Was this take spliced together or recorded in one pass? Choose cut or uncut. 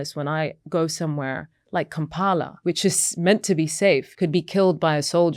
cut